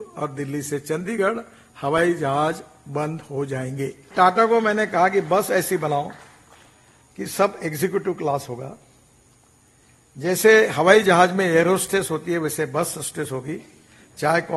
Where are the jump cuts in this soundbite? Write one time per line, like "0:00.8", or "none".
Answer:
0:04.1